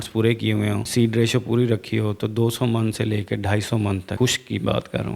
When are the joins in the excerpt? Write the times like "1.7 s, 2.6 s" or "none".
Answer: 0.9 s, 4.1 s